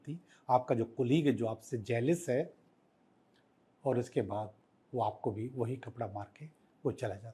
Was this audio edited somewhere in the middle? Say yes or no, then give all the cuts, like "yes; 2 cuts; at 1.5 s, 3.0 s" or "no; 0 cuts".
no; 0 cuts